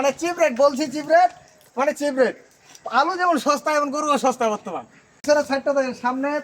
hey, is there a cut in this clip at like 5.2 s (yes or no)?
yes